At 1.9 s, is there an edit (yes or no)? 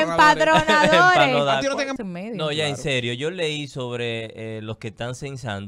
yes